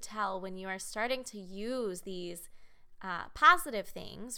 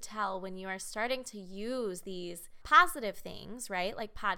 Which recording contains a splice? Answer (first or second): second